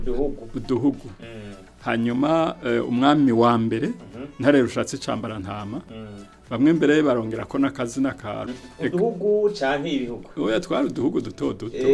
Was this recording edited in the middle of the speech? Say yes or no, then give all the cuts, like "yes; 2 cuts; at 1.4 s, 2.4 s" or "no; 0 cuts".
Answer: yes; 1 cut; at 8.5 s